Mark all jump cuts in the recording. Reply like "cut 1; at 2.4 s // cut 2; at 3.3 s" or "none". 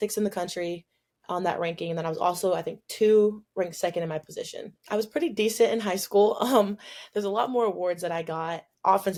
none